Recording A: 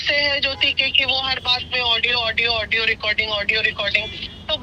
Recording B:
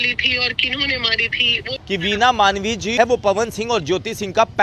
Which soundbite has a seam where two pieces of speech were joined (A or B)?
B